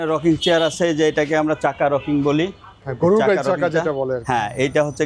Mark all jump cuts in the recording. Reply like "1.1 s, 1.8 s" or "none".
none